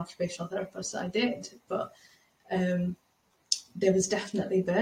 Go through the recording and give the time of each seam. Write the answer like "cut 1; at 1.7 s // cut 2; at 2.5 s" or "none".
none